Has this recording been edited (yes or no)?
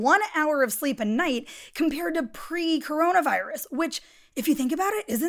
no